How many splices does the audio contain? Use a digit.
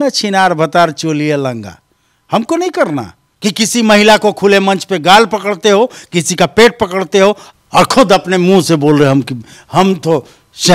2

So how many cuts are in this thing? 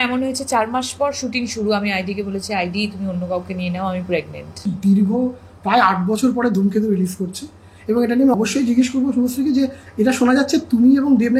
2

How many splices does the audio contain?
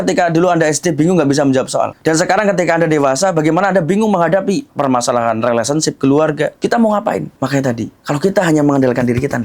2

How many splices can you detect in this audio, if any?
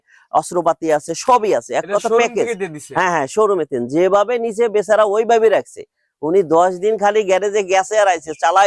0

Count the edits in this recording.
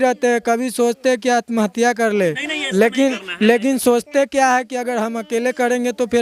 0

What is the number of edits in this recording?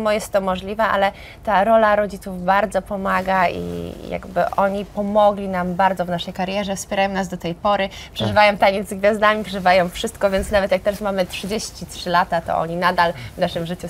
0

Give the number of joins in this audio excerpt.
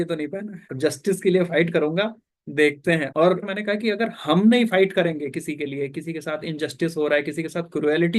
1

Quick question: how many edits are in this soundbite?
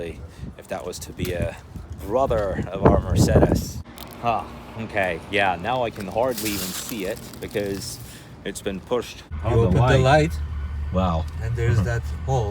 2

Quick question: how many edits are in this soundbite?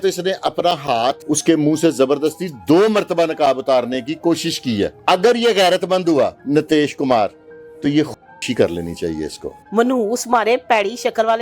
4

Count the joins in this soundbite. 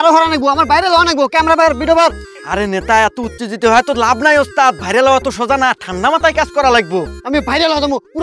0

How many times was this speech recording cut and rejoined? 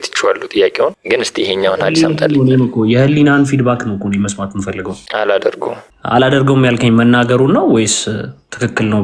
3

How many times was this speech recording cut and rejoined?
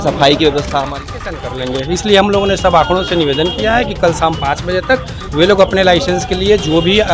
1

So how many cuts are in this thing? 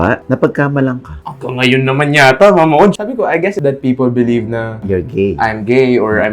2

